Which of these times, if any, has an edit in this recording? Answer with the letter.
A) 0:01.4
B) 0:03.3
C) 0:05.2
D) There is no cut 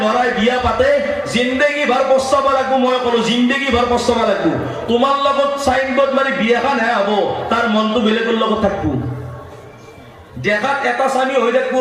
D